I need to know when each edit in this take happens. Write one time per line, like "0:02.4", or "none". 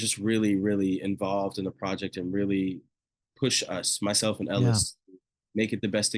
none